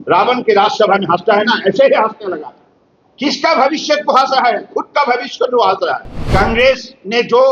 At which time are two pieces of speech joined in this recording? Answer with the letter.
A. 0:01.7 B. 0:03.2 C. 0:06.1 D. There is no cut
C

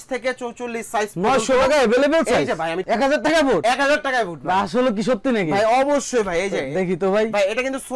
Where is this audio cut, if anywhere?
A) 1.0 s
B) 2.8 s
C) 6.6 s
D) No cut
B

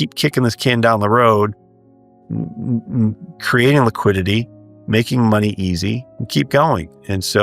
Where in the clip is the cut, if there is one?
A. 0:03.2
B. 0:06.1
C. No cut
B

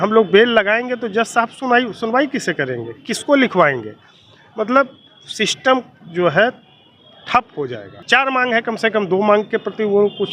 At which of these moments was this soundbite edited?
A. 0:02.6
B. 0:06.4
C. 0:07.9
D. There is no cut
C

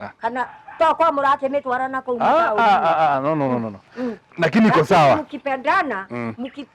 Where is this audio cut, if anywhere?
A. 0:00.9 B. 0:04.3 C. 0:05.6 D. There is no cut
B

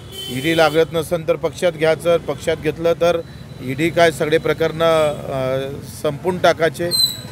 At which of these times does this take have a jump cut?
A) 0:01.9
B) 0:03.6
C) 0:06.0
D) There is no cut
D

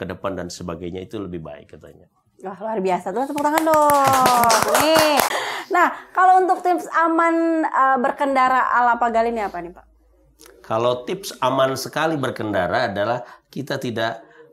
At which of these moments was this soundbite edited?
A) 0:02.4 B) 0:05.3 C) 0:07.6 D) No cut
B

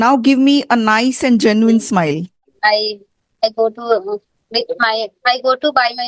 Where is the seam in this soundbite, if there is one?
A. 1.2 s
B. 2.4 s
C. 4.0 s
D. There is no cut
B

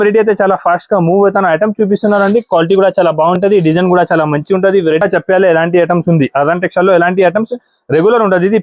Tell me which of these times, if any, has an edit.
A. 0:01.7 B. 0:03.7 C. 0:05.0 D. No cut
C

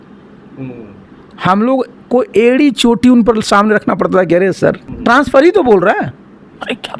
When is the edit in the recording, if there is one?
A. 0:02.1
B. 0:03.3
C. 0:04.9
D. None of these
C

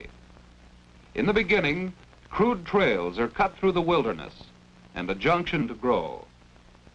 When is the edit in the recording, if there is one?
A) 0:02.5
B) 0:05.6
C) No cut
C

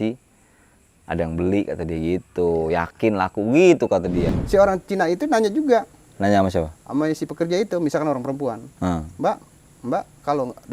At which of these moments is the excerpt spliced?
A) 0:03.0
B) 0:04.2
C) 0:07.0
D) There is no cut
B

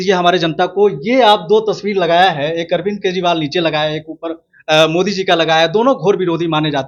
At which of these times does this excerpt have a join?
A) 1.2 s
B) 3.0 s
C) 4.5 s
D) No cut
D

